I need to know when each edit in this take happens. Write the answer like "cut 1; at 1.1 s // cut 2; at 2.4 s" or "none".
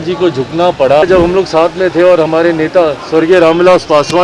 cut 1; at 1.0 s